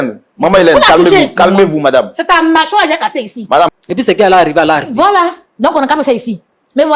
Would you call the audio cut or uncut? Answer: cut